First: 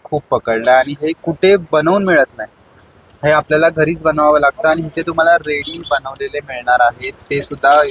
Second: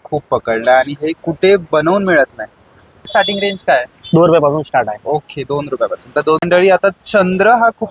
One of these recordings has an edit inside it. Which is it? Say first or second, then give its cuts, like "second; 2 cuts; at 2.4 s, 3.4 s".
second; 2 cuts; at 3.1 s, 6.4 s